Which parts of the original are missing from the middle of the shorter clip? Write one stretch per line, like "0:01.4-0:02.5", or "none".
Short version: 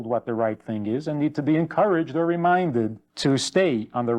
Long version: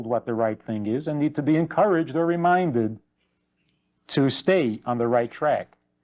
0:03.0-0:04.0